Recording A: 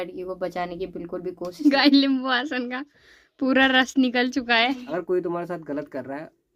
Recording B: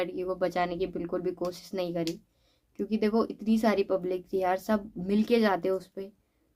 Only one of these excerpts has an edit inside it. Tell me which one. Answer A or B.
A